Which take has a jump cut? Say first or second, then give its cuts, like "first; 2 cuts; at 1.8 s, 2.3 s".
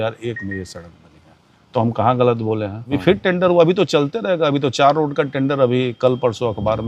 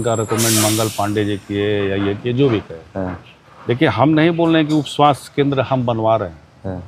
first; 1 cut; at 2.9 s